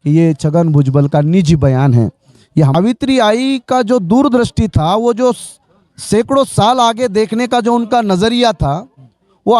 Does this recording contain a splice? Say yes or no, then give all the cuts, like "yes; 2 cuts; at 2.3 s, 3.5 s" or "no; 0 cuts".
yes; 1 cut; at 2.7 s